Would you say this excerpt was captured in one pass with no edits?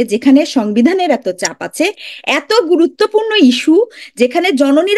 yes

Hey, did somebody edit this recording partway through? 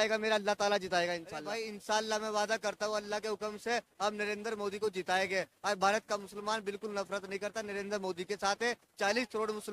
yes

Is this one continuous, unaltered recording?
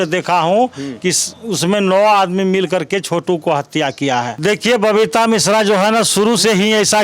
no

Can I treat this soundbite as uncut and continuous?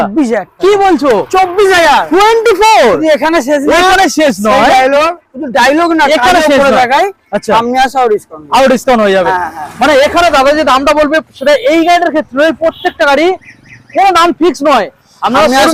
yes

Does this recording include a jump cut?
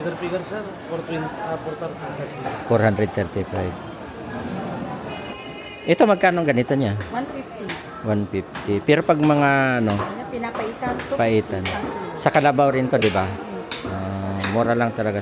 yes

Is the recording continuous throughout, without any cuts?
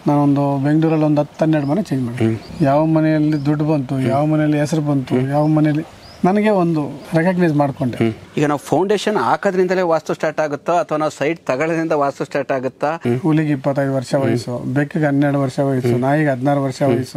no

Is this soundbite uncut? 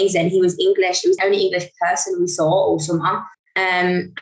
no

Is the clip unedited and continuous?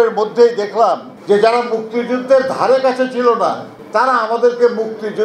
no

